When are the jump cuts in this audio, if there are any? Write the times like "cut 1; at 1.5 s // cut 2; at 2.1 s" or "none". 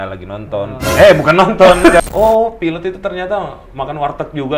cut 1; at 2.0 s